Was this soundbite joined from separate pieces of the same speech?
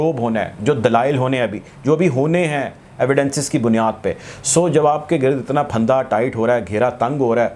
no; 0 cuts

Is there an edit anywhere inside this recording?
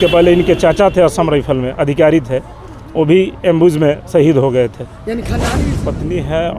yes; 1 cut; at 5.4 s

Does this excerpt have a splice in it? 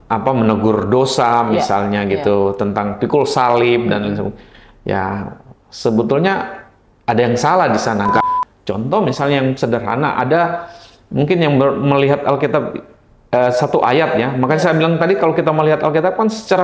yes; 1 cut; at 8.2 s

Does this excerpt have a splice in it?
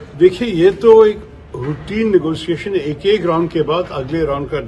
no; 0 cuts

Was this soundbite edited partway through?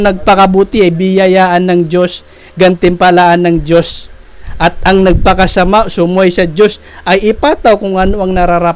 no; 0 cuts

